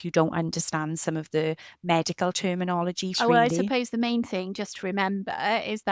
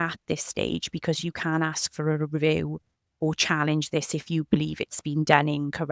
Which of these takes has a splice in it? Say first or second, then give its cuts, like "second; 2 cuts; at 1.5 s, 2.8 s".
first; 1 cut; at 3.2 s